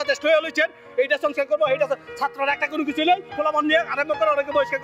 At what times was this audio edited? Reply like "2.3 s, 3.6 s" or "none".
3.3 s